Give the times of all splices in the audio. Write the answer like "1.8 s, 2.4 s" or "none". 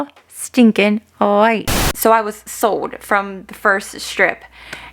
1.9 s